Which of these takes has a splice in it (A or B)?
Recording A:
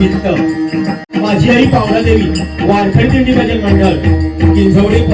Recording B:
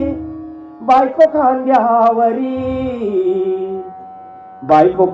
A